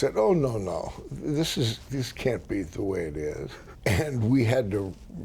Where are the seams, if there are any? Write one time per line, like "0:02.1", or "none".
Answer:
0:03.6